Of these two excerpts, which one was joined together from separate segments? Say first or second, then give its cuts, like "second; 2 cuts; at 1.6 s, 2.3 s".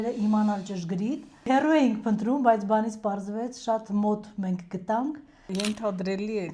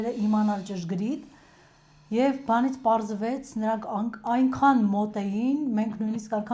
first; 2 cuts; at 1.5 s, 5.5 s